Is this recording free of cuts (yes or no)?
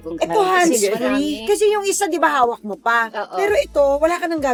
yes